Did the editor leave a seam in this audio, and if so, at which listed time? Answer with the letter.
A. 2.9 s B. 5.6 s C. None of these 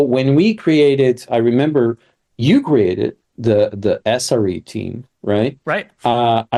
C